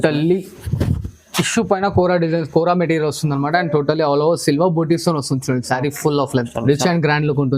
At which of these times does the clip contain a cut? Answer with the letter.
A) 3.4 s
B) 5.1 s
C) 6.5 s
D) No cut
C